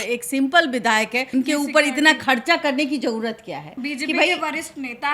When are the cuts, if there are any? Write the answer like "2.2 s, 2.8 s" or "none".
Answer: 3.8 s